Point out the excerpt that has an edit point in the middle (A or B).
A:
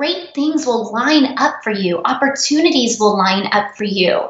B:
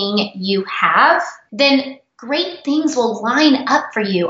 B